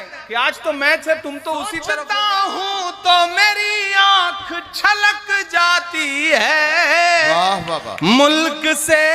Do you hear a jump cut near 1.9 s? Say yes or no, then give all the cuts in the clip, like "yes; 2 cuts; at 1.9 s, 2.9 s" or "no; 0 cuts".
yes; 1 cut; at 1.9 s